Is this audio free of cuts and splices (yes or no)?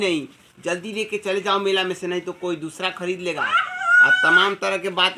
yes